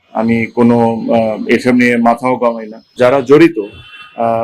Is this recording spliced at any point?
yes; 1 cut; at 2.9 s

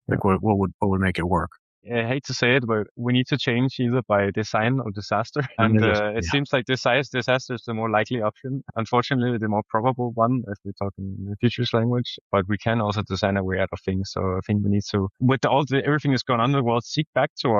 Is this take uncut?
no; 1 cut; at 1.8 s

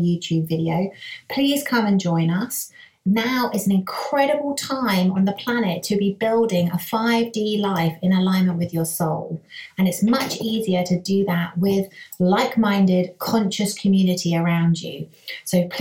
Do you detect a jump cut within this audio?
no; 0 cuts

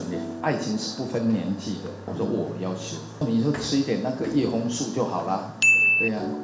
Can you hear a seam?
no; 0 cuts

